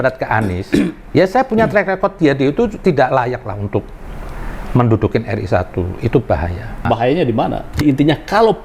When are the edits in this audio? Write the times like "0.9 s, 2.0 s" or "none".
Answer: 6.8 s, 7.7 s